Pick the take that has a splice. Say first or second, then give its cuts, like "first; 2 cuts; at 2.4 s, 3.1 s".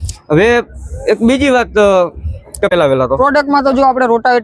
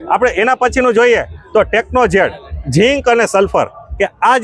first; 1 cut; at 2.7 s